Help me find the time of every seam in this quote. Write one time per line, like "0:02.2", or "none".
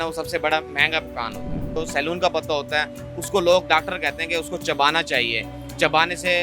0:01.6